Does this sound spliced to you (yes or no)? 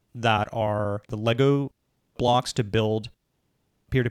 yes